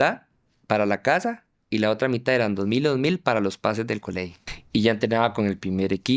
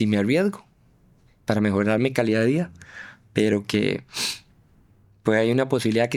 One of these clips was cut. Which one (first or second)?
first